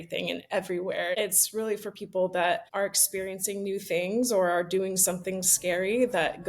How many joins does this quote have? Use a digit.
2